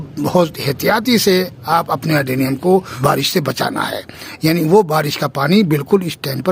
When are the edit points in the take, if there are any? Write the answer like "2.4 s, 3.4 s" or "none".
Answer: 2.9 s